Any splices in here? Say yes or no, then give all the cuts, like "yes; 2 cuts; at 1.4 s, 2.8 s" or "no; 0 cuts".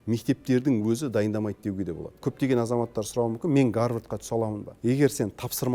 yes; 2 cuts; at 2.3 s, 4.6 s